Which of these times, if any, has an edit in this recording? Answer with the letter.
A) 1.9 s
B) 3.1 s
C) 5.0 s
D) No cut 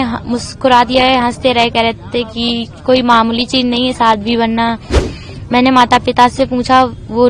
C